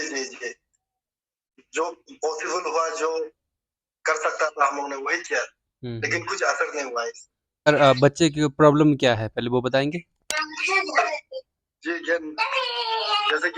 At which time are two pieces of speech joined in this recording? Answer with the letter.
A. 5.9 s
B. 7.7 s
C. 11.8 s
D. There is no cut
B